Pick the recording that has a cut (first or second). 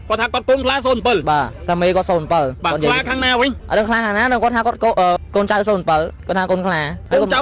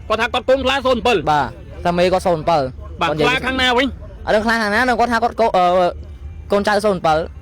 first